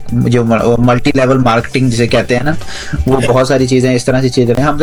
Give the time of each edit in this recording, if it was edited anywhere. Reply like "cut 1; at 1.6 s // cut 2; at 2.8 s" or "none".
none